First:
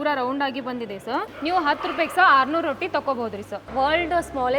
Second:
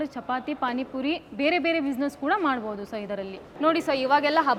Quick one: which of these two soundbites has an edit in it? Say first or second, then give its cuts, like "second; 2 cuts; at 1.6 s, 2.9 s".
first; 2 cuts; at 1.3 s, 3.6 s